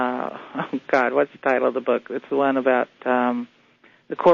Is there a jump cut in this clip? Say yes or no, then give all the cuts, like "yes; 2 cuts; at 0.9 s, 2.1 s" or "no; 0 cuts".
no; 0 cuts